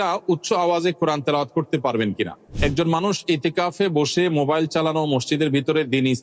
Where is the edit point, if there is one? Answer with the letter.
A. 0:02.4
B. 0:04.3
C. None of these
A